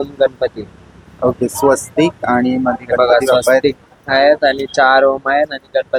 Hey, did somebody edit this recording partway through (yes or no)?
no